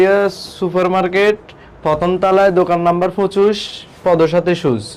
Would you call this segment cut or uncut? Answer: uncut